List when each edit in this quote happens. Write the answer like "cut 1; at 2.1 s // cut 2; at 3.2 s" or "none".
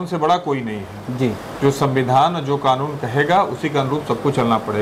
none

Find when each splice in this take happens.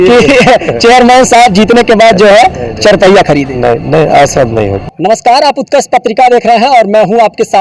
cut 1; at 4.9 s

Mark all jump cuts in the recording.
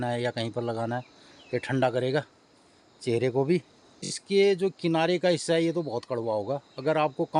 cut 1; at 4.1 s

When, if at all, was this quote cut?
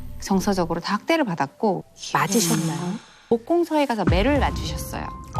cut 1; at 1.8 s // cut 2; at 3.3 s

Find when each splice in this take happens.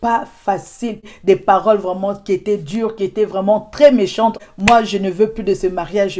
cut 1; at 0.8 s // cut 2; at 4.5 s

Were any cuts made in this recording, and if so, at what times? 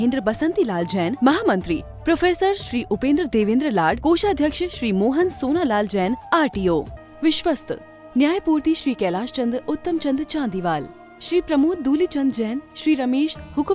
cut 1; at 7.0 s

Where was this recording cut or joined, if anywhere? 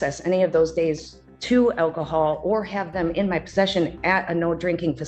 none

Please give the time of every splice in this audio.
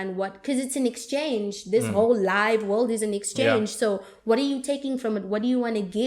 none

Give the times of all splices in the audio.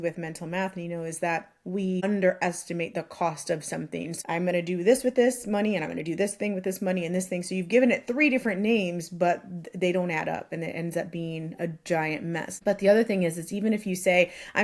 cut 1; at 2.0 s // cut 2; at 4.1 s // cut 3; at 12.5 s

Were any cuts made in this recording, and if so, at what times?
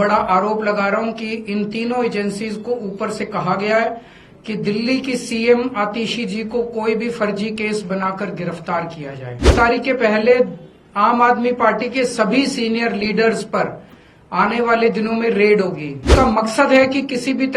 cut 1; at 9.5 s // cut 2; at 16.1 s

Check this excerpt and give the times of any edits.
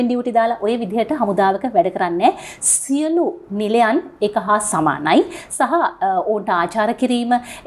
none

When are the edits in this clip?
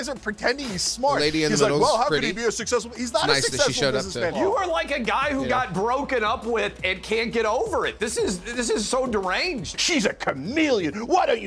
cut 1; at 4.4 s // cut 2; at 9.7 s

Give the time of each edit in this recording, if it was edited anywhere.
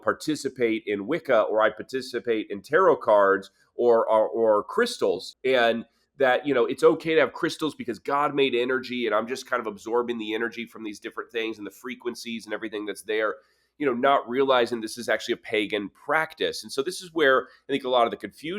cut 1; at 5.3 s

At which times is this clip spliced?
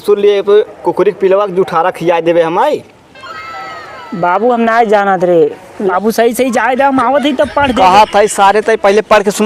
cut 1; at 5.9 s

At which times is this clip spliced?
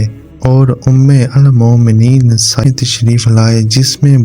cut 1; at 2.6 s

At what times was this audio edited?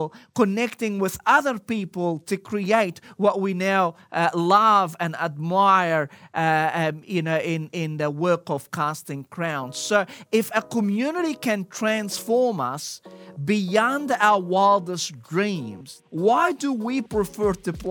cut 1; at 15.9 s

